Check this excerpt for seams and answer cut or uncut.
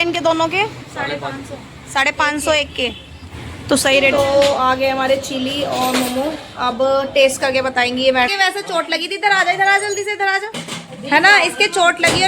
cut